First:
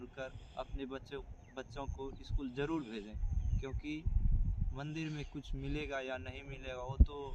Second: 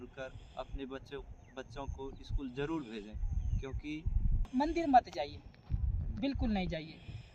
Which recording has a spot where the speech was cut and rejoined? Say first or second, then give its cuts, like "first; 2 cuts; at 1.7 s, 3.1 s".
second; 1 cut; at 4.5 s